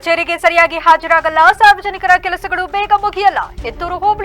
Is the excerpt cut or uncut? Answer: uncut